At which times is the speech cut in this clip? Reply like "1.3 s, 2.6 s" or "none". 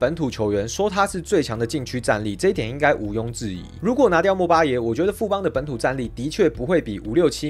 none